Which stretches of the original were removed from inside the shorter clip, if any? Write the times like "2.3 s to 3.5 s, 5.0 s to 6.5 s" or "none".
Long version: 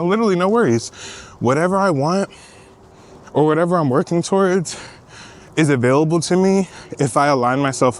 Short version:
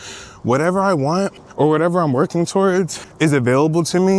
2.4 s to 3.2 s, 4.8 s to 5.4 s